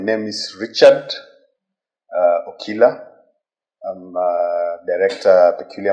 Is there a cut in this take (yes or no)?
no